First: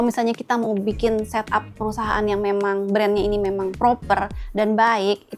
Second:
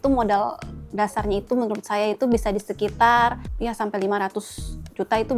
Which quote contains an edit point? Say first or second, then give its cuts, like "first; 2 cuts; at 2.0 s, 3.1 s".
second; 1 cut; at 3.5 s